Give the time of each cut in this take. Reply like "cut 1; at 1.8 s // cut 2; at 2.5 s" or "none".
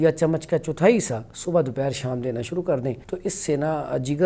cut 1; at 3.1 s